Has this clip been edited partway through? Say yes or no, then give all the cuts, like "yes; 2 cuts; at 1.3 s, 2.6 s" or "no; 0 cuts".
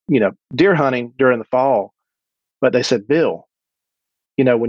no; 0 cuts